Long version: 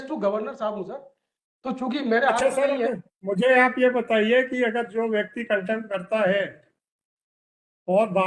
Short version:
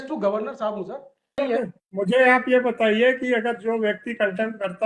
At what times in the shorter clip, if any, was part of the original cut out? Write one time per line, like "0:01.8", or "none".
0:01.4